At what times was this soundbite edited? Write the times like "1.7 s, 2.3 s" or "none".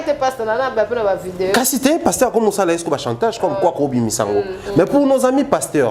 4.6 s